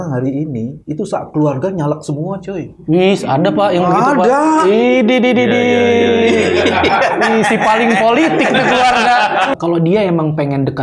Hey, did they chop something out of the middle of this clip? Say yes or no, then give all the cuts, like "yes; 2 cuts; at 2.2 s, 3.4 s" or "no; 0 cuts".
yes; 1 cut; at 9.5 s